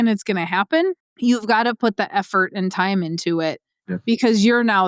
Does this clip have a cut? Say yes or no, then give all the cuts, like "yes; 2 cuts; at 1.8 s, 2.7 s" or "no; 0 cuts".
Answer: yes; 1 cut; at 1.1 s